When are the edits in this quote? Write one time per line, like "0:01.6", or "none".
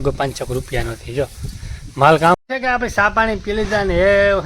0:02.4